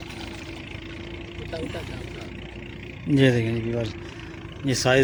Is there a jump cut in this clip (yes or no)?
no